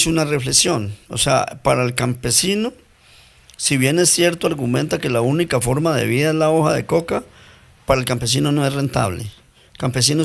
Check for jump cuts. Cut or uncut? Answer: uncut